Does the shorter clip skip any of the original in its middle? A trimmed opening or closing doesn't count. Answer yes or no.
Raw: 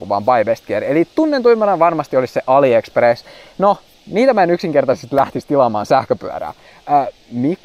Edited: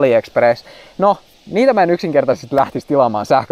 no